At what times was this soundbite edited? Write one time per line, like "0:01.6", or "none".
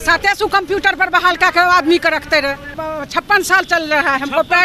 0:02.8

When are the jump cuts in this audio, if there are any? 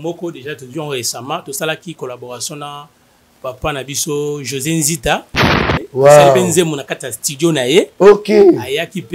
0:05.4

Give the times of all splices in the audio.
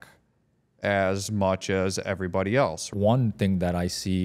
0:02.9

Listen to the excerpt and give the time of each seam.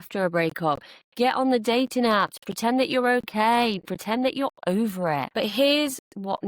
0:05.3

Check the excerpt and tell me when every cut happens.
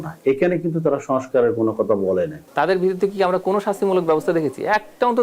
0:02.4

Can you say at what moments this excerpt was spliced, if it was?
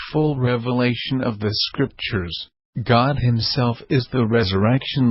0:04.1

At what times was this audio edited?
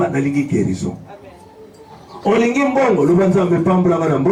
none

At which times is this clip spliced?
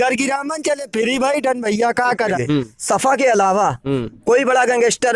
0:02.4

